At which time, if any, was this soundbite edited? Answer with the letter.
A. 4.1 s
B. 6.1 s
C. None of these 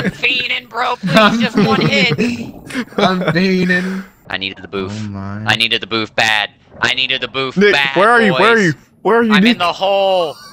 A